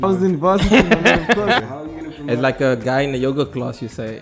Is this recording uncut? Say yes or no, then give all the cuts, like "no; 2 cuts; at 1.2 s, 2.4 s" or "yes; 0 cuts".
no; 1 cut; at 1.6 s